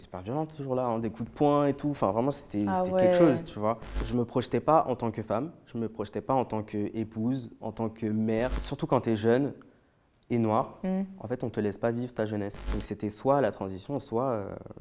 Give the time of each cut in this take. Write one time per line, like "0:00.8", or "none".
0:04.0
0:08.6
0:12.6